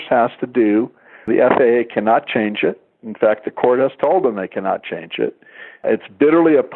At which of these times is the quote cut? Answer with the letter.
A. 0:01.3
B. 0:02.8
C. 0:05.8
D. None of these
A